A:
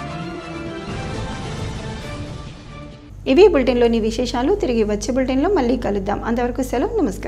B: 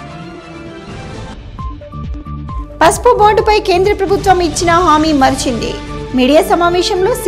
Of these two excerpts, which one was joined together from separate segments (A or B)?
B